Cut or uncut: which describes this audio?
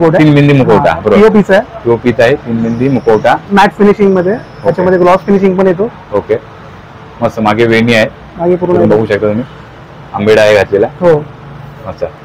uncut